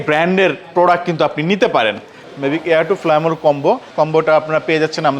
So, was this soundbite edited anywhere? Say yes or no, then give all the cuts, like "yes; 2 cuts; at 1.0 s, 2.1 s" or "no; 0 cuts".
yes; 2 cuts; at 2.3 s, 3.9 s